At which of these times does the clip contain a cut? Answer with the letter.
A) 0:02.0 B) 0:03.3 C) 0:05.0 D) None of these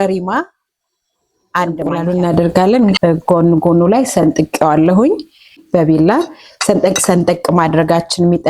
A